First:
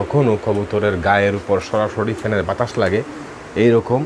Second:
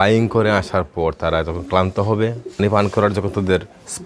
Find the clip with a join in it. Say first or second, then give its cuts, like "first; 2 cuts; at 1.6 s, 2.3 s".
second; 1 cut; at 2.6 s